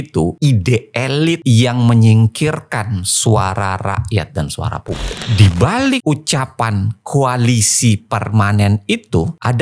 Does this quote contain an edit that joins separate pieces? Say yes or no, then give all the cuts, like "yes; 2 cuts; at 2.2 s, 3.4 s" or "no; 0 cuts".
yes; 1 cut; at 5.3 s